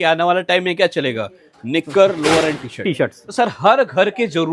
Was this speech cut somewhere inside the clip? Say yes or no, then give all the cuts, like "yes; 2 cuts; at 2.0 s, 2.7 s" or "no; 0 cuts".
no; 0 cuts